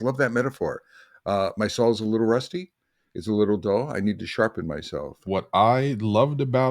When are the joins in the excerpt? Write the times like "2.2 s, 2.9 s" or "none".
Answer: 5.2 s